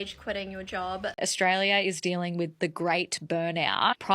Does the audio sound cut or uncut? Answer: cut